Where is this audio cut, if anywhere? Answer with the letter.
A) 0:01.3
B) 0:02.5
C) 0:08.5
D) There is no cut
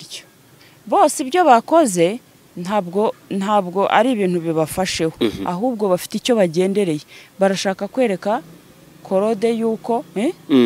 D